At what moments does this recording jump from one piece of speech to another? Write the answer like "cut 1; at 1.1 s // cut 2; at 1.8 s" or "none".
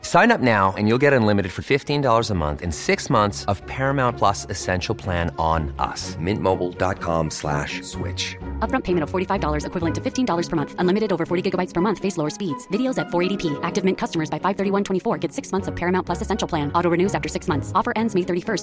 none